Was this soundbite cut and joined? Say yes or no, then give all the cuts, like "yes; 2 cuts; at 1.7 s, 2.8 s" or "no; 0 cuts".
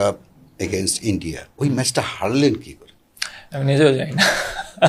no; 0 cuts